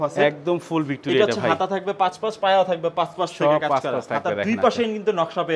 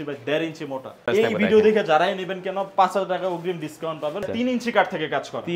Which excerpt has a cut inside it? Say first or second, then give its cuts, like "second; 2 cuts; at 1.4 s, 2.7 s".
second; 2 cuts; at 1.1 s, 4.3 s